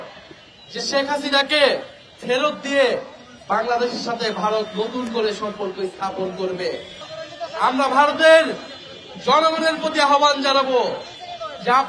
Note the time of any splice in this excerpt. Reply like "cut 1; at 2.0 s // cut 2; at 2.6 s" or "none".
cut 1; at 7.0 s

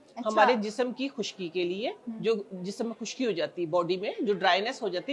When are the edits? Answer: none

